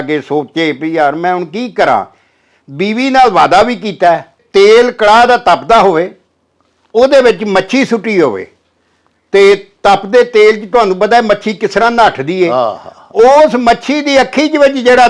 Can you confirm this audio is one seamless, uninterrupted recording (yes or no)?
no